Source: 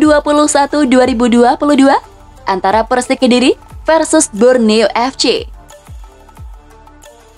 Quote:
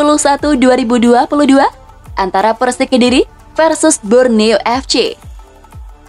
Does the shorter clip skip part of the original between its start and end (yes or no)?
yes